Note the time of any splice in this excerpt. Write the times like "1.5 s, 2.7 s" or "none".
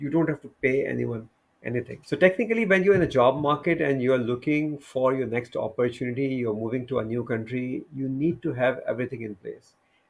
1.9 s

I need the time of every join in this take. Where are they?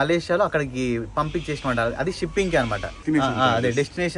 2.9 s

